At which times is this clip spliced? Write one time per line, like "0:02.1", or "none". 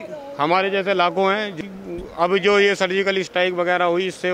0:01.6